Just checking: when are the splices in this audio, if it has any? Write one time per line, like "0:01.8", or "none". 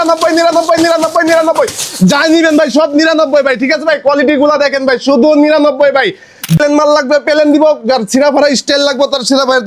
0:06.6